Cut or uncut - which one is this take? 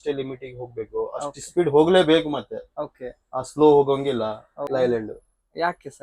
cut